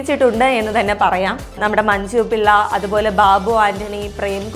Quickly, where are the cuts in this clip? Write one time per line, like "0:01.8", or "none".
0:01.6